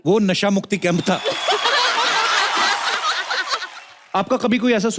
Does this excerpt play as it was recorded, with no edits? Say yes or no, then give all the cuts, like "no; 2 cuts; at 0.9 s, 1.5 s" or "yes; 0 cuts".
no; 1 cut; at 4.0 s